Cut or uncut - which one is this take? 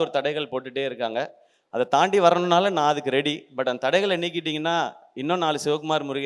uncut